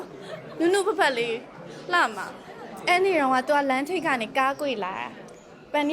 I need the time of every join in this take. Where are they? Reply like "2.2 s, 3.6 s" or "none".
2.2 s